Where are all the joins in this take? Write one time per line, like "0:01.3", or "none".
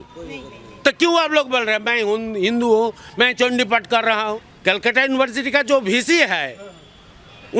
0:04.5